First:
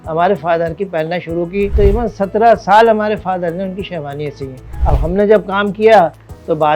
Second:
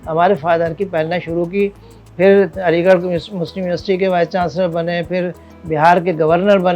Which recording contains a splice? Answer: first; 2 cuts; at 1.8 s, 4.7 s

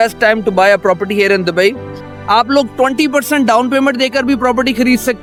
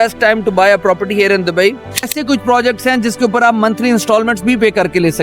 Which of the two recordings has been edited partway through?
second; 1 cut; at 2.1 s

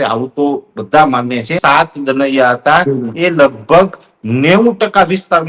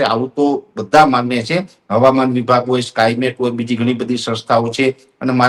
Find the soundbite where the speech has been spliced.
first; 1 cut; at 1.6 s

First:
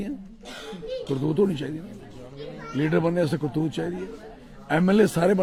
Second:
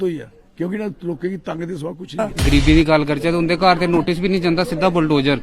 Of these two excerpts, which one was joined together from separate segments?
second; 1 cut; at 2.3 s

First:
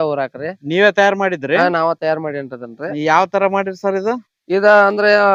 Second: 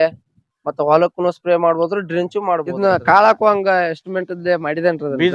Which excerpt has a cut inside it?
second; 1 cut; at 2.6 s

